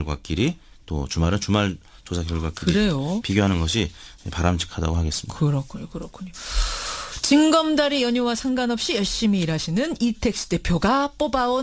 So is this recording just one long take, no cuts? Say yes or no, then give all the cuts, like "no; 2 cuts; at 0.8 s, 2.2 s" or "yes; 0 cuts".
yes; 0 cuts